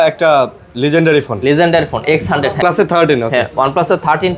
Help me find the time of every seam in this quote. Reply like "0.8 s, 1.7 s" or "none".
2.6 s